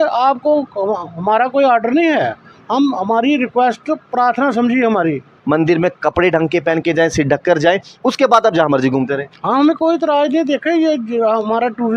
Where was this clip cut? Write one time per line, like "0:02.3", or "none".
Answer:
0:05.3